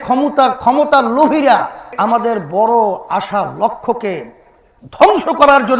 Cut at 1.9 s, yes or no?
yes